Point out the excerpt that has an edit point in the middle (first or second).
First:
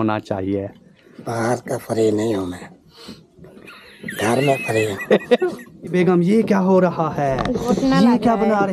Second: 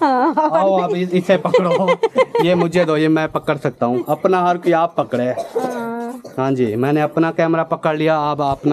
first